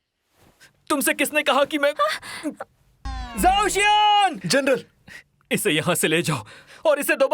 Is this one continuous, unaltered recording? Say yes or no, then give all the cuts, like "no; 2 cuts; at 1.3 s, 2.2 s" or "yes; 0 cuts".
no; 2 cuts; at 3.0 s, 4.4 s